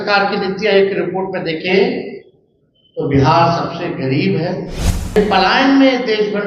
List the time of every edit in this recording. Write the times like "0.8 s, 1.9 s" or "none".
5.2 s